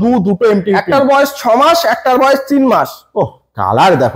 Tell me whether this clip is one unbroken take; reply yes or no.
yes